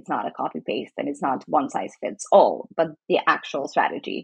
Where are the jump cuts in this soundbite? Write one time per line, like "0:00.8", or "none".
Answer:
none

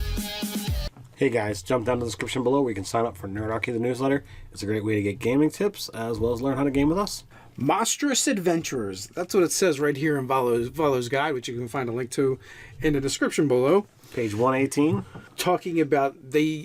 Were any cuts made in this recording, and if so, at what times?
0:01.3

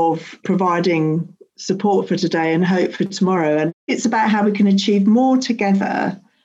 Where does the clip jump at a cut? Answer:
0:03.9

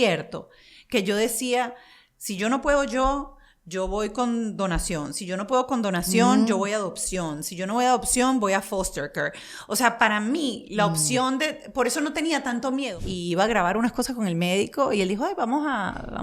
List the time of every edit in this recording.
0:12.9

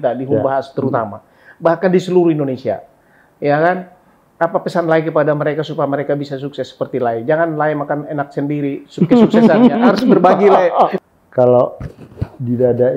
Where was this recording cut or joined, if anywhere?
0:11.0

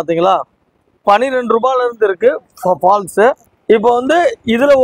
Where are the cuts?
0:03.5

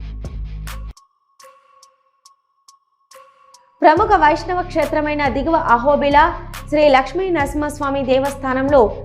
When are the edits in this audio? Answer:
none

